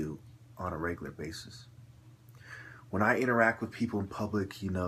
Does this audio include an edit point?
yes; 1 cut; at 2.5 s

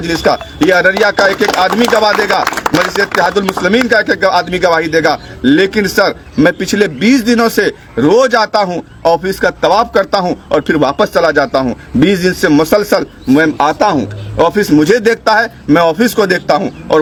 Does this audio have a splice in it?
no; 0 cuts

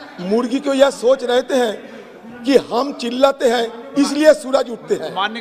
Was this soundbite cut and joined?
no; 0 cuts

